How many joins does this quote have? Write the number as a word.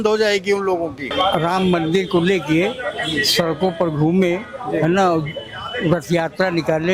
one